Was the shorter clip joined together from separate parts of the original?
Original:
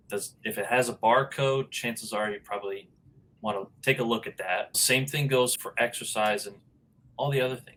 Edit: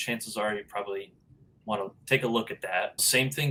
no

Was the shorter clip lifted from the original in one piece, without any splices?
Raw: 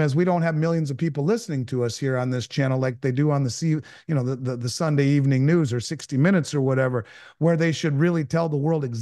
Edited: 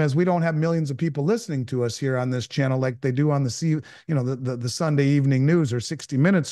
yes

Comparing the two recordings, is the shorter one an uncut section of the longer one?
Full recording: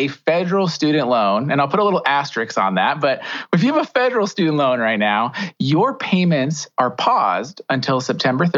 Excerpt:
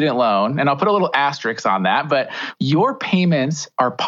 no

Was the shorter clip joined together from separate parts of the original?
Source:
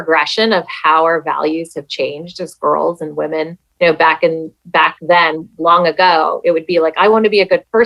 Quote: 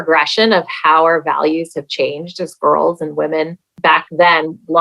yes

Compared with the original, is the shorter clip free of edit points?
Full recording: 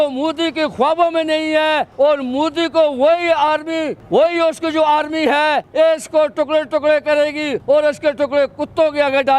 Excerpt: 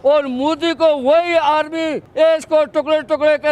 no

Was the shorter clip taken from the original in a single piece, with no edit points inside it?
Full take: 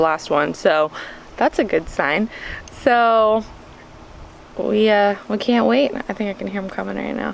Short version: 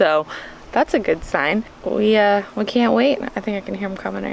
no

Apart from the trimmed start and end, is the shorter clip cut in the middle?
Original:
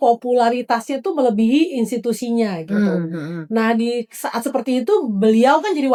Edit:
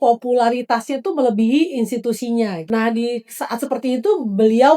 yes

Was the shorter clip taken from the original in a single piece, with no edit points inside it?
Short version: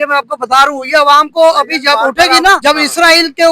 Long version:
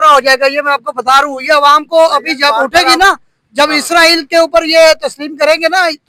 no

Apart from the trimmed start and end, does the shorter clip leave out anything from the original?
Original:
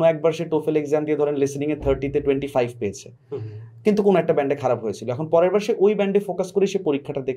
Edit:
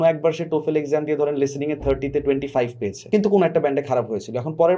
yes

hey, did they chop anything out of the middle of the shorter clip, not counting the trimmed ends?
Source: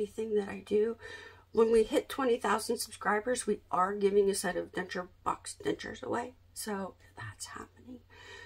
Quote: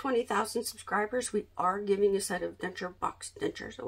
yes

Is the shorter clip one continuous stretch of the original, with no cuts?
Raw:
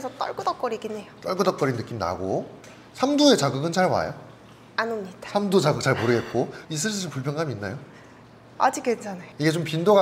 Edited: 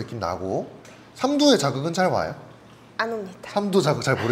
yes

